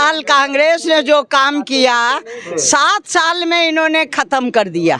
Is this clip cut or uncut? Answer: uncut